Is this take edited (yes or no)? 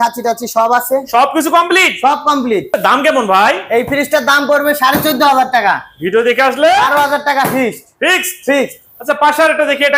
no